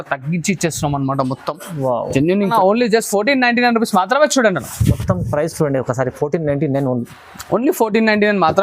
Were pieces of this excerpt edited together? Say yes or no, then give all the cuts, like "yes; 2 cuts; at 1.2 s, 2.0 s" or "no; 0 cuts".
yes; 1 cut; at 2.5 s